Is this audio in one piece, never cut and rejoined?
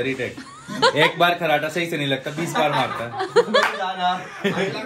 yes; 0 cuts

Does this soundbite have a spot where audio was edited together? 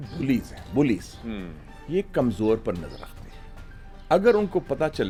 no; 0 cuts

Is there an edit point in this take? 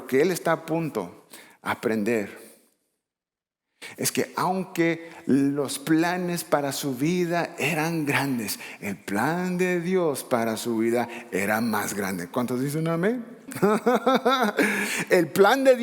yes; 1 cut; at 13.5 s

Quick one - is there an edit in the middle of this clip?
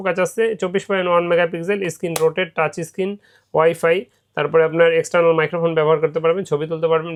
no; 0 cuts

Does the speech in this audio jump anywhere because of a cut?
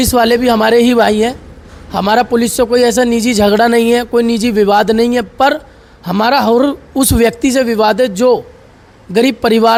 no; 0 cuts

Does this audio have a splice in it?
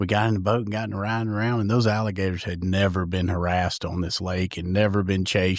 no; 0 cuts

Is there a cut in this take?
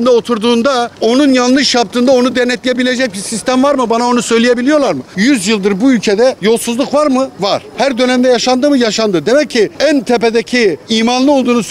yes; 6 cuts; at 0.9 s, 5.1 s, 6.4 s, 7.4 s, 9.7 s, 10.8 s

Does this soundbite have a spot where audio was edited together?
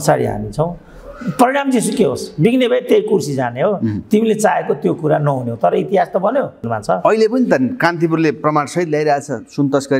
yes; 1 cut; at 6.5 s

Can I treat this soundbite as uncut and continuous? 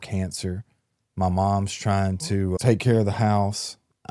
no; 1 cut; at 2.6 s

